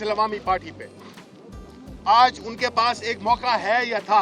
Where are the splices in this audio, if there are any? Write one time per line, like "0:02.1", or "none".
none